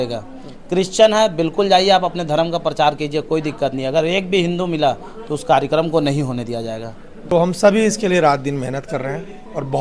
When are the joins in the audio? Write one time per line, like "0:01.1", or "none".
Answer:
0:07.3